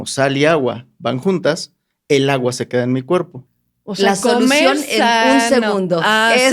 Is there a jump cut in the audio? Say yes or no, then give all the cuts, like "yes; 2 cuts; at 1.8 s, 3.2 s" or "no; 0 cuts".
yes; 1 cut; at 3.4 s